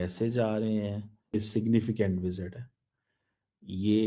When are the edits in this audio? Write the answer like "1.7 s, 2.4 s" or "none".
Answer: none